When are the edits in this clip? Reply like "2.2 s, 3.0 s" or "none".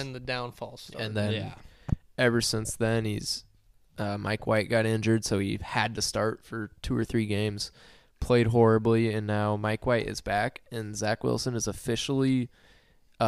none